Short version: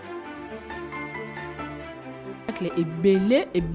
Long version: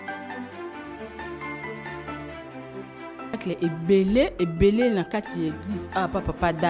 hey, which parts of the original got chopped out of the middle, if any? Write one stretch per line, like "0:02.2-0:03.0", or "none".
0:02.9-0:03.3